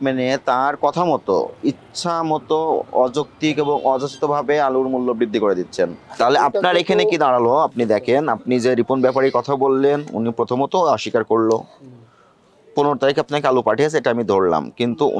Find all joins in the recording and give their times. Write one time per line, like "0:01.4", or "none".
0:06.0